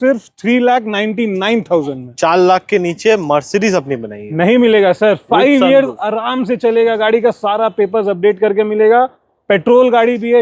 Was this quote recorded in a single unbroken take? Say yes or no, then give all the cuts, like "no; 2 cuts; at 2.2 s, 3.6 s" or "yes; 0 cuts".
yes; 0 cuts